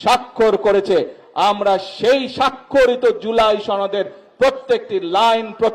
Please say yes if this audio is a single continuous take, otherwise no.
yes